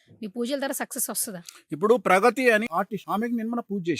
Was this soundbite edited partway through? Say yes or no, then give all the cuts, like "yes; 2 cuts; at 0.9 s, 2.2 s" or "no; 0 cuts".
yes; 1 cut; at 2.7 s